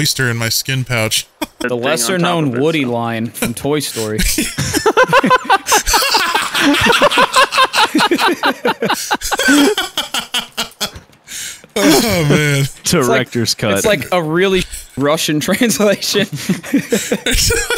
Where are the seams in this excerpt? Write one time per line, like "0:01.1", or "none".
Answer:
0:01.7